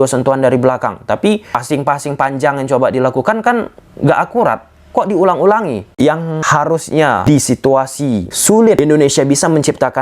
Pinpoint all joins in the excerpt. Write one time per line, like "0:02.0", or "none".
0:05.9
0:07.2
0:08.8